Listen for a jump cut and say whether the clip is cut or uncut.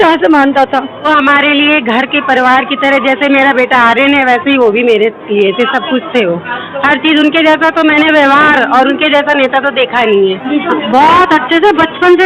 cut